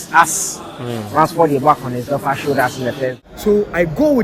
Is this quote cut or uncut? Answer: cut